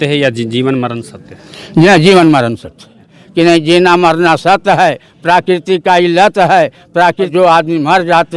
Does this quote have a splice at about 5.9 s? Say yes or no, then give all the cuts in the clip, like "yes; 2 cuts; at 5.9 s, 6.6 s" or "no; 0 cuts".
no; 2 cuts; at 3.2 s, 7.3 s